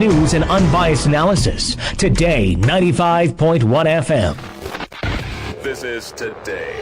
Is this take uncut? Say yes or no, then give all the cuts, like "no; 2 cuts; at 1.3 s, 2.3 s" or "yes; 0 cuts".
no; 1 cut; at 4.5 s